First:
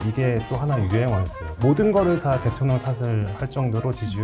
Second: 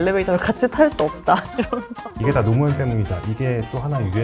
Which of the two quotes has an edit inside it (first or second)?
second